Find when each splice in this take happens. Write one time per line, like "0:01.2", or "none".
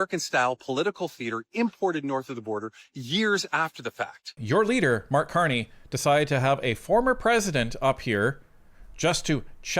0:04.4